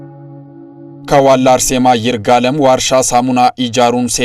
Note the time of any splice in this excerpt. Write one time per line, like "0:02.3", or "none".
0:01.0